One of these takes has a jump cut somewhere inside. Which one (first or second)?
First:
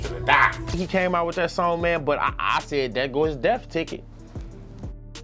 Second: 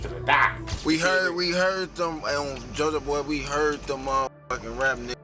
second